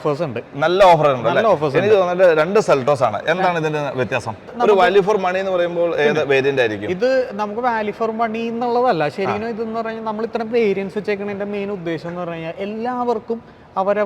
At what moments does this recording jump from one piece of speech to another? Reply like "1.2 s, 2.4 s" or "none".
4.5 s

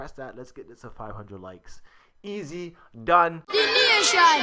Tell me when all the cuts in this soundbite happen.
3.4 s

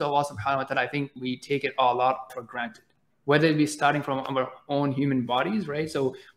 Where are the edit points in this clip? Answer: 1.2 s, 2.3 s

